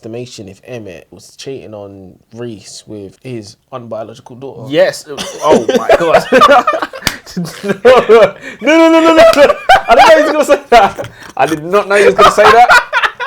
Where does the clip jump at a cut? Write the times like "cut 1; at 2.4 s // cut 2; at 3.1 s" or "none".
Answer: cut 1; at 1.2 s // cut 2; at 3.1 s